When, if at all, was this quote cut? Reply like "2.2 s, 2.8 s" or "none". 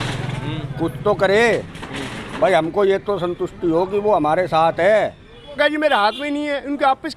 5.6 s